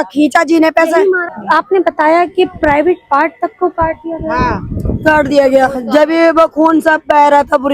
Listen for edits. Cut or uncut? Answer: cut